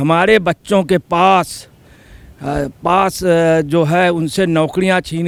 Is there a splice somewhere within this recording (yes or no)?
no